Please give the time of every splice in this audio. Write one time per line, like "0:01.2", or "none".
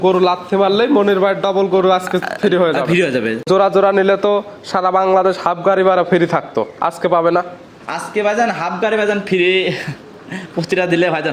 0:03.4